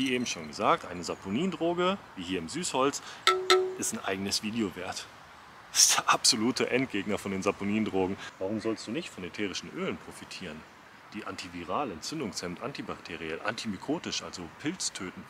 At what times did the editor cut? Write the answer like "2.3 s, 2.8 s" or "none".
8.2 s